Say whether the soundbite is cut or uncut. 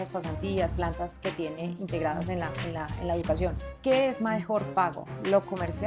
cut